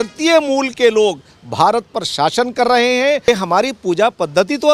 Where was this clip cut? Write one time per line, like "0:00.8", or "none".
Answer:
0:03.3

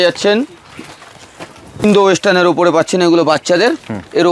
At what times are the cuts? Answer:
0:01.8

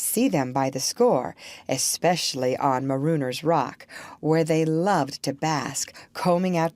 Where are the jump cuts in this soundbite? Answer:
0:02.3

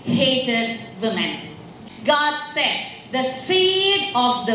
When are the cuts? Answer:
0:01.7

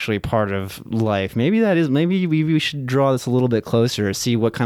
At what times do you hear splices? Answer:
none

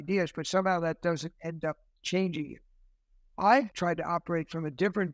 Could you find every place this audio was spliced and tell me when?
0:03.7

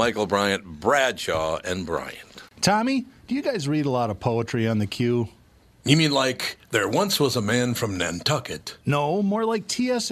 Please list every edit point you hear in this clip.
0:02.4

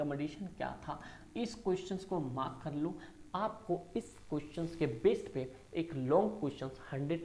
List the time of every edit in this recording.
none

